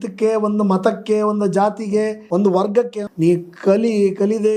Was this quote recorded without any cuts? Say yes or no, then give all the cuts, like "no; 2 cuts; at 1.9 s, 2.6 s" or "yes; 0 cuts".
no; 2 cuts; at 2.2 s, 3.0 s